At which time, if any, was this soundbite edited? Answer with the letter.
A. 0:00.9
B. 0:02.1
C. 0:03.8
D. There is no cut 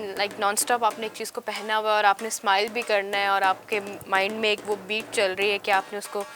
D